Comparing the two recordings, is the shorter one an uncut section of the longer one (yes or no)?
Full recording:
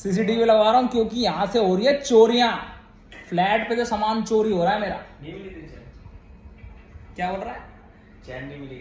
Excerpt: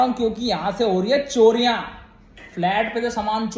yes